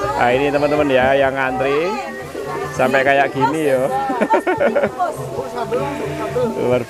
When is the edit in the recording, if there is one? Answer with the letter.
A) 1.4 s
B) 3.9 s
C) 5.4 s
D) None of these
D